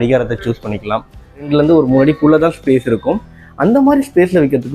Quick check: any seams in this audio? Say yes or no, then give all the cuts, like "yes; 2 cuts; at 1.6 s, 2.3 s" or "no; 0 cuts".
yes; 1 cut; at 1.5 s